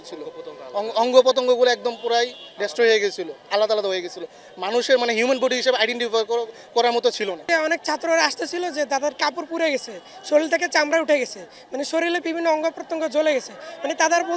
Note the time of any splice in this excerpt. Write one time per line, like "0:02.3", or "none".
0:07.4